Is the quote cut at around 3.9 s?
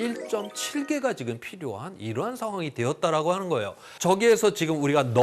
yes; 1 cut; at 3.9 s

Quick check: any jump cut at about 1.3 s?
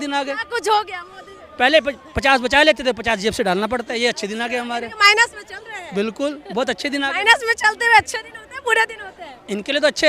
no; 0 cuts

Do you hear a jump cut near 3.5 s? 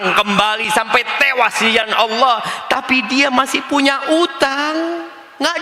no; 0 cuts

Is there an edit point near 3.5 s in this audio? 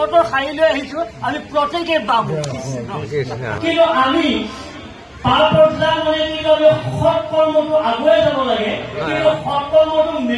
yes; 1 cut; at 3.5 s

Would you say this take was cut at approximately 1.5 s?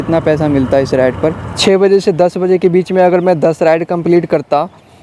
yes; 1 cut; at 1.5 s

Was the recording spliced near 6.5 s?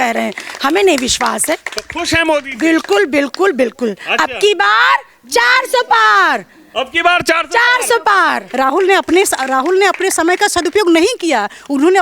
no; 1 cut; at 8.4 s

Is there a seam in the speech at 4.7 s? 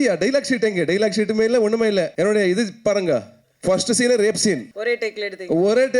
yes; 2 cuts; at 2.1 s, 4.7 s

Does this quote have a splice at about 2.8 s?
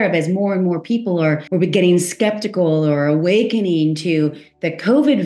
no; 1 cut; at 1.4 s

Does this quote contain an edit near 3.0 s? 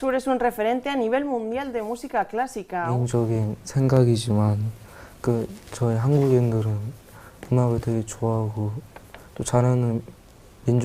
yes; 1 cut; at 3.0 s

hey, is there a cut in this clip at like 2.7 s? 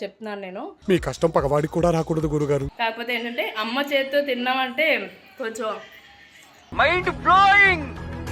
yes; 1 cut; at 2.7 s

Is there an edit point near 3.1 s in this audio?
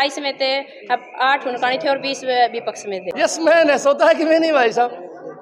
yes; 1 cut; at 3.1 s

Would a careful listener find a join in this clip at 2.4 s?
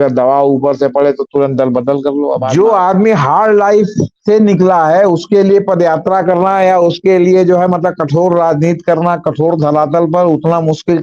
yes; 1 cut; at 2.4 s

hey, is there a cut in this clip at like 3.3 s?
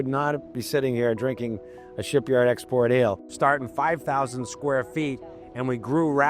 yes; 1 cut; at 3.3 s

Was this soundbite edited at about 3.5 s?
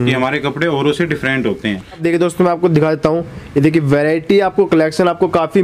no; 1 cut; at 2.0 s

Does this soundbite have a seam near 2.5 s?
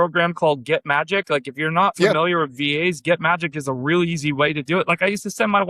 no; 0 cuts

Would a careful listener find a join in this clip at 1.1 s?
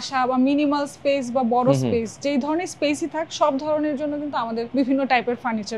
no; 1 cut; at 4.7 s

